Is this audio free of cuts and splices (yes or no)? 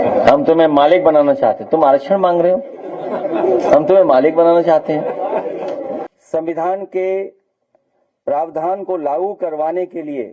no